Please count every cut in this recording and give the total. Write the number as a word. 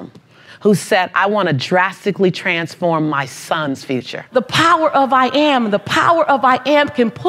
one